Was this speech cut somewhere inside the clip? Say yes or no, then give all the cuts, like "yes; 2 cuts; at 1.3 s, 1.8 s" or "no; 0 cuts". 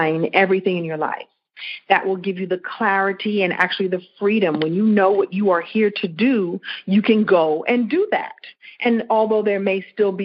no; 0 cuts